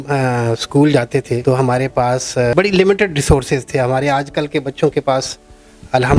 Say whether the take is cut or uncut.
cut